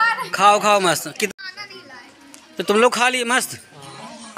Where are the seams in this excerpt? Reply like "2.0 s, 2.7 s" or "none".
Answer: 1.3 s